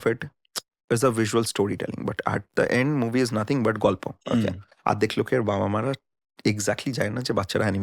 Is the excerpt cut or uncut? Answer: cut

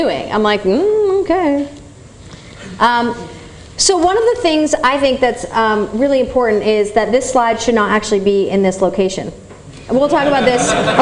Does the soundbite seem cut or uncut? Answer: cut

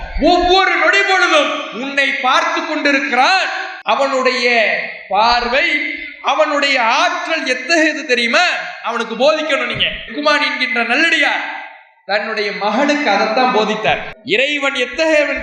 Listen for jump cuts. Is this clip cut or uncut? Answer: cut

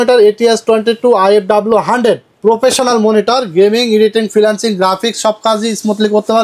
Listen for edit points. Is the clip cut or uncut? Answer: uncut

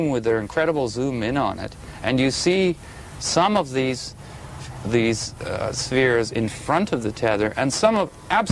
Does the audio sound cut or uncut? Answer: uncut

